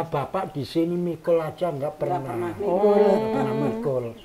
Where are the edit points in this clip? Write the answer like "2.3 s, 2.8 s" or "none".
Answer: none